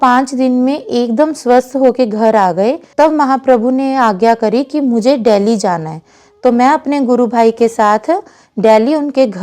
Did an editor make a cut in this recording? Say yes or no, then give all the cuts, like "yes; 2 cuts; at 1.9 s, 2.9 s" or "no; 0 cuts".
no; 0 cuts